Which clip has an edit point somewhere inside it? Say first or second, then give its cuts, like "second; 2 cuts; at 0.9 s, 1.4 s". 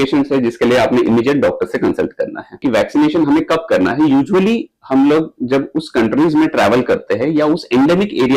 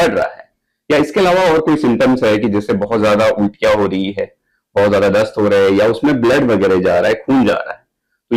first; 1 cut; at 2.6 s